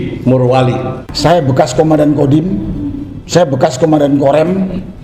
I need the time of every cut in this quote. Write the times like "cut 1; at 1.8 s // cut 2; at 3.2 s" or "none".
cut 1; at 1.0 s